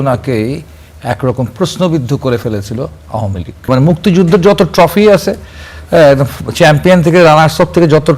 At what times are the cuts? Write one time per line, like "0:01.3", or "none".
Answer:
0:03.7